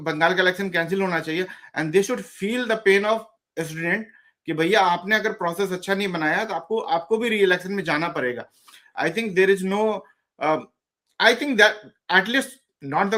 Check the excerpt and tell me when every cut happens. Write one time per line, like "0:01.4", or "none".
none